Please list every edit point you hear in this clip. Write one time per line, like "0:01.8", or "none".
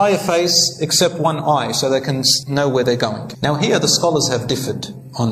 0:02.3
0:03.3